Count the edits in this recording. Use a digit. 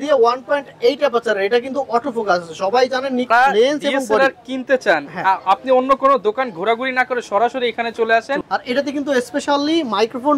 2